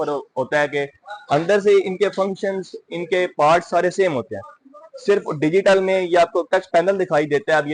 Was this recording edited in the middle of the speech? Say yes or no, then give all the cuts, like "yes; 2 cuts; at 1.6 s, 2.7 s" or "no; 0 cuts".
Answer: no; 0 cuts